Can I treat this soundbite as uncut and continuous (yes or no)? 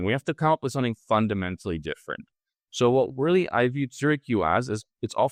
yes